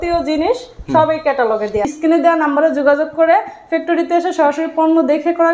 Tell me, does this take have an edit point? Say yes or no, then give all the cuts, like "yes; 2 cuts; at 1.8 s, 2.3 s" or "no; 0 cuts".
yes; 1 cut; at 1.9 s